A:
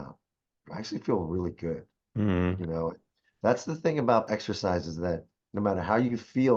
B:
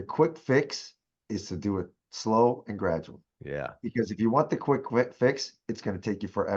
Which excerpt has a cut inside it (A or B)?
A